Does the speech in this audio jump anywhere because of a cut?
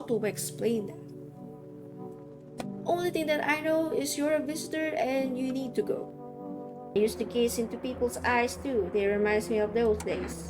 yes; 1 cut; at 6.9 s

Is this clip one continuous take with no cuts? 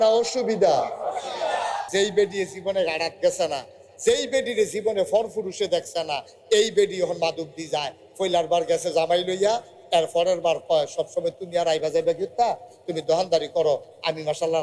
no; 1 cut; at 1.9 s

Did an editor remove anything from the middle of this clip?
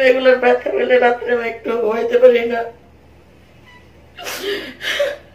no; 0 cuts

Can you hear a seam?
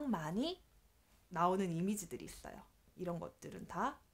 yes; 1 cut; at 2.9 s

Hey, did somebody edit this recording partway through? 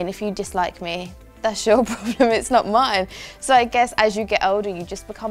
no; 0 cuts

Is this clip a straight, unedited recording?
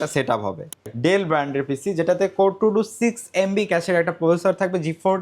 no; 1 cut; at 0.9 s

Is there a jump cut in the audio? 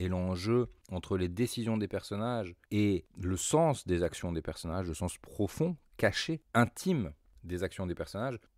no; 0 cuts

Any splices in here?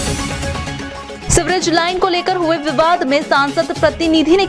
yes; 1 cut; at 1.2 s

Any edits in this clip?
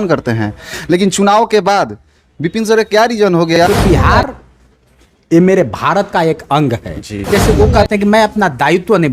yes; 2 cuts; at 3.5 s, 7.3 s

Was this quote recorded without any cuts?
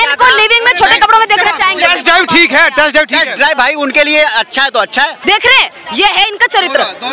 no; 2 cuts; at 1.8 s, 5.2 s

